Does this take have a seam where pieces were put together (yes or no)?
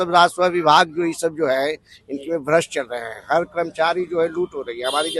no